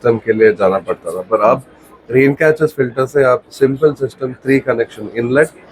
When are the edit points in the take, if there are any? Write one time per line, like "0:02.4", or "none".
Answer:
none